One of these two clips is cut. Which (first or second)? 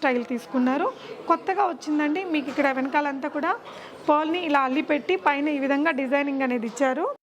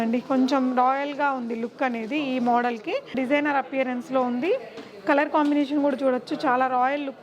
second